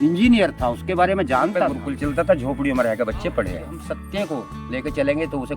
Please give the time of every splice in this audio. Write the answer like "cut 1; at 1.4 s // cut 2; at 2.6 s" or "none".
cut 1; at 1.8 s // cut 2; at 3.9 s